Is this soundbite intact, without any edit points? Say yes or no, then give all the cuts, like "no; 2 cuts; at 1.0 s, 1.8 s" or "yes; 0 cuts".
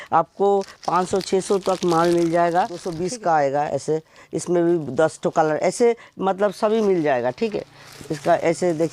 no; 1 cut; at 2.9 s